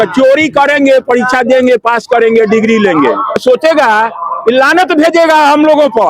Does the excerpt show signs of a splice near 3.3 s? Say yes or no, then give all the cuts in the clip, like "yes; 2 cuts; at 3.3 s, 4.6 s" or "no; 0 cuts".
yes; 1 cut; at 3.3 s